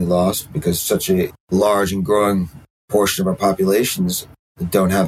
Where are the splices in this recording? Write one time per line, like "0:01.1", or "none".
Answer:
none